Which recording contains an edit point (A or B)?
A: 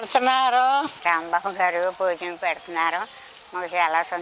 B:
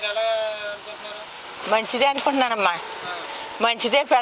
A